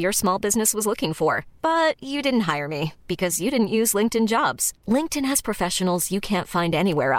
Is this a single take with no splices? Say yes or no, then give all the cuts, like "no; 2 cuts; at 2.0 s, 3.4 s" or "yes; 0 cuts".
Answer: yes; 0 cuts